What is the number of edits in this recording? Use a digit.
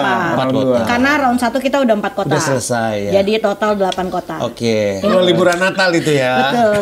1